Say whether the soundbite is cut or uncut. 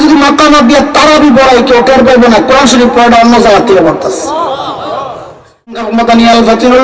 cut